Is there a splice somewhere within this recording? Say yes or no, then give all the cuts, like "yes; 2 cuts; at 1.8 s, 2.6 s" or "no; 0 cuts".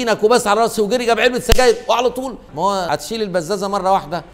yes; 1 cut; at 2.9 s